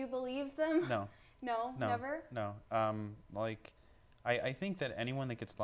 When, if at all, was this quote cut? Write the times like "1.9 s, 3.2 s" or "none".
none